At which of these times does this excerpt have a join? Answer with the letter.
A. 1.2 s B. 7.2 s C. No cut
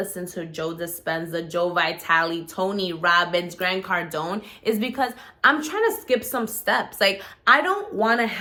C